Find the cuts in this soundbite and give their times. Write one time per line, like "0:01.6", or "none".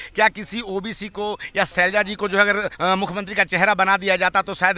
0:01.7
0:02.7